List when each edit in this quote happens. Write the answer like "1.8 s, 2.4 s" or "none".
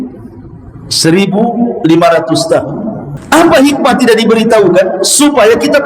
3.2 s